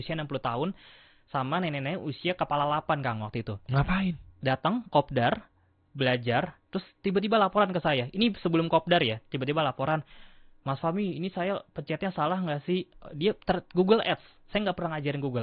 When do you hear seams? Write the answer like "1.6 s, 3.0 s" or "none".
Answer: none